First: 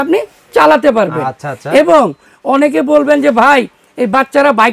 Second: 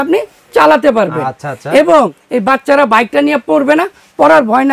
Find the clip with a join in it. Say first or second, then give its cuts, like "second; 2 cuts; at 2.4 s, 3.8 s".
second; 1 cut; at 2.2 s